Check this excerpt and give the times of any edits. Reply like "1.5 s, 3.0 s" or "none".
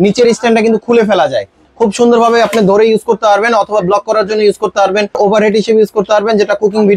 5.2 s